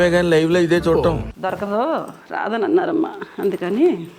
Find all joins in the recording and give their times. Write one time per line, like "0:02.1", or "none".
0:01.2